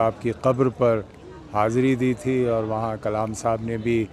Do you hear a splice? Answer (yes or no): no